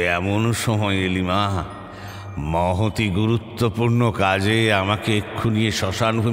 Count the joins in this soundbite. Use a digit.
0